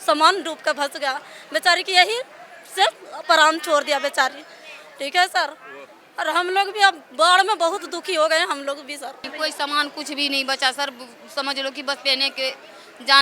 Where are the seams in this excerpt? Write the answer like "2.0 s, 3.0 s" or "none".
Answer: 9.3 s